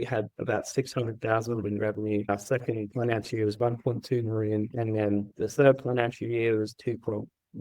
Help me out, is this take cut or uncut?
cut